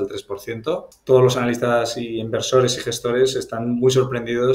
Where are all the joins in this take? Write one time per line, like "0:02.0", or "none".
0:00.9